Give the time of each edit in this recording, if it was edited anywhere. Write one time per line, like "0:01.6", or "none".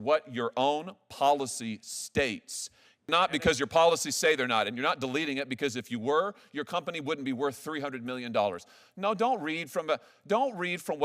0:03.1